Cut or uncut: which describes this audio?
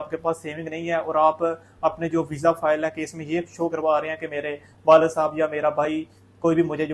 uncut